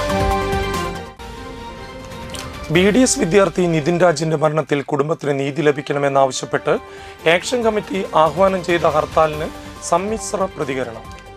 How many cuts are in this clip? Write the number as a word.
zero